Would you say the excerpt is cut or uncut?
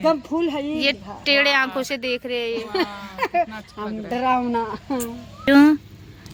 uncut